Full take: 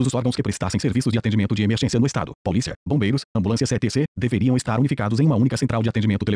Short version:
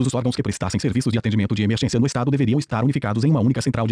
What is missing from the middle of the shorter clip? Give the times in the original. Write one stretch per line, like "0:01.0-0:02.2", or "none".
0:02.6-0:04.6